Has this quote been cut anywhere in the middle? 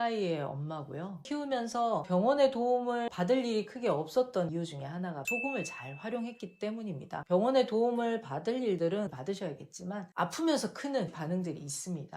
yes; 3 cuts; at 1.1 s, 7.2 s, 10.1 s

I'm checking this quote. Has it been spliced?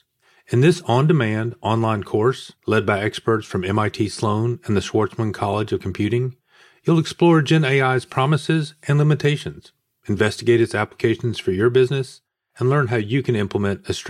no; 0 cuts

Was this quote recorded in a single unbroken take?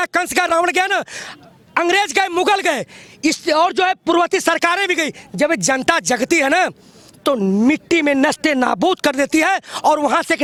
yes; 0 cuts

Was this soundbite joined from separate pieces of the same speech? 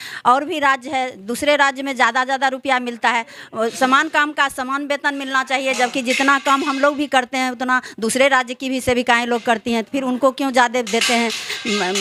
no; 0 cuts

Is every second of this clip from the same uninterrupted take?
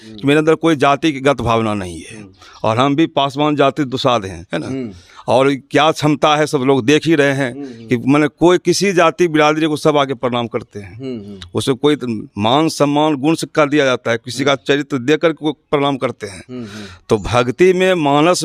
yes; 0 cuts

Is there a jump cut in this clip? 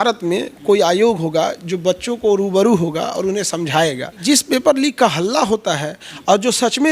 yes; 1 cut; at 4.2 s

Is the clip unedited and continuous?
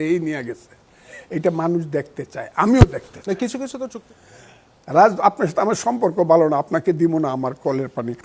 no; 1 cut; at 3.8 s

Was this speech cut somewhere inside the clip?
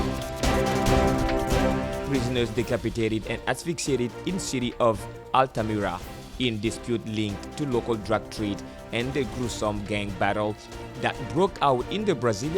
yes; 1 cut; at 2.0 s

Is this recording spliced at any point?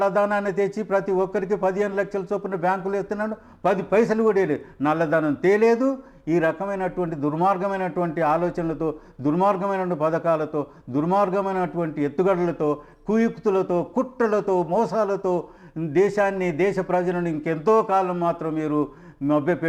no; 0 cuts

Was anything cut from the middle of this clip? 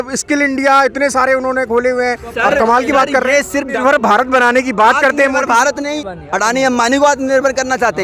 yes; 2 cuts; at 3.8 s, 6.0 s

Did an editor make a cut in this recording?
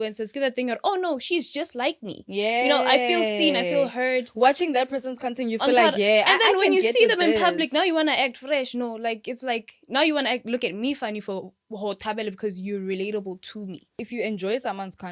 yes; 1 cut; at 14.0 s

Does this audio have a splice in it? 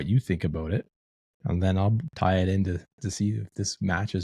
no; 0 cuts

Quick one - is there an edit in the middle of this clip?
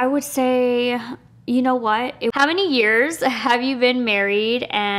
yes; 1 cut; at 2.3 s

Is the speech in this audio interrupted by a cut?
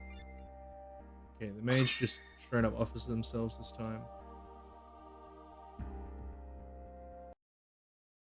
no; 0 cuts

